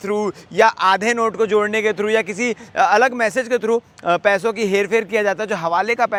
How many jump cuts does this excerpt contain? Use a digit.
0